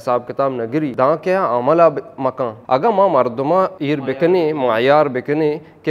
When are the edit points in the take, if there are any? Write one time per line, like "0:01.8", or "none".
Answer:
0:00.9
0:02.6
0:03.8